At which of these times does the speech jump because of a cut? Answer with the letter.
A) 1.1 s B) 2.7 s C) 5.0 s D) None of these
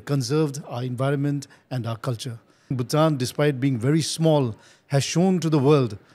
B